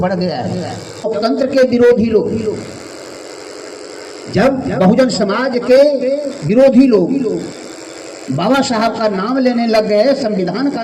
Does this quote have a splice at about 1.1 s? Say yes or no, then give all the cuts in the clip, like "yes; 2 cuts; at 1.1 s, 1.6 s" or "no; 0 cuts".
yes; 1 cut; at 1.1 s